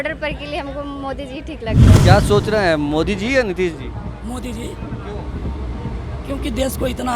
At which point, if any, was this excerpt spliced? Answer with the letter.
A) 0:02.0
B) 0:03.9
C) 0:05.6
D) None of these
A